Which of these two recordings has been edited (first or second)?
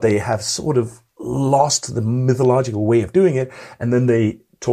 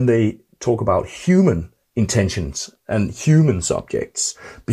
second